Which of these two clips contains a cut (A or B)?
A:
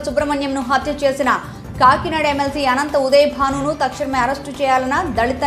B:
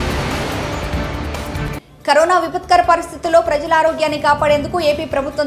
B